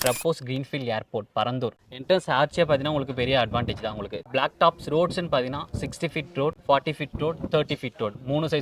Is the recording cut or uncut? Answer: cut